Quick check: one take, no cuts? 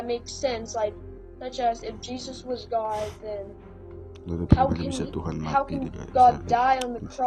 yes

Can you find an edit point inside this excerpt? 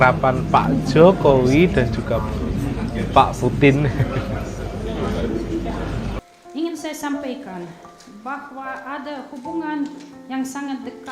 yes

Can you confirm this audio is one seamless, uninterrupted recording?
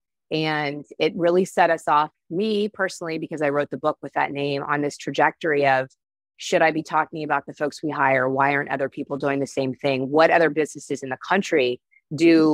yes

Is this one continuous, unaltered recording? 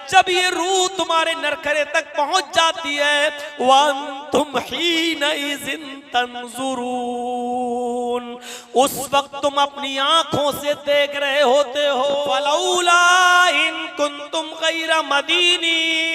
no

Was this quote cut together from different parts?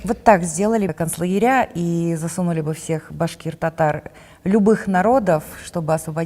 yes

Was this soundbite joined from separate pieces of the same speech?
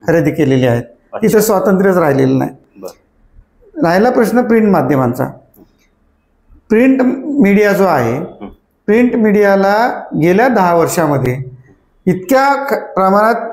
no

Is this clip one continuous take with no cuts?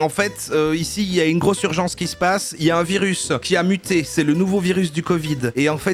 yes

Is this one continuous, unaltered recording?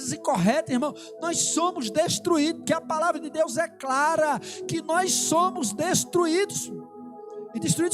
yes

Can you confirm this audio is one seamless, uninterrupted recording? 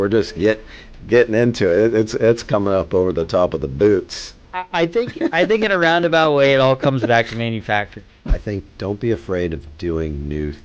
no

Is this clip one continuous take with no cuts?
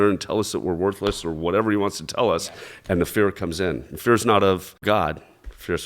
no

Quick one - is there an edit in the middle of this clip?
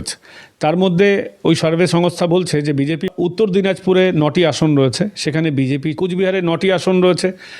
yes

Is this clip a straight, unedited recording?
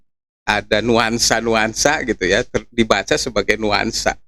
yes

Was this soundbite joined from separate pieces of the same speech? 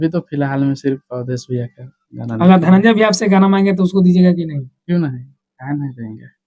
no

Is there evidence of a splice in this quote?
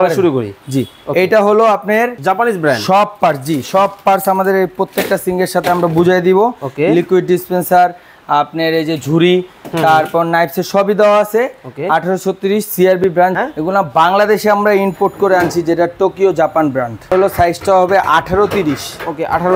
yes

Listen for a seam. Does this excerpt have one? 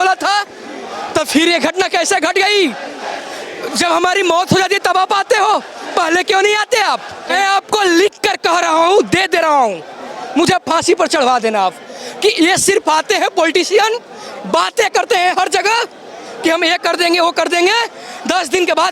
yes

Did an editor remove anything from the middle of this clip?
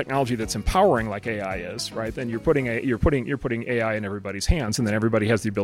no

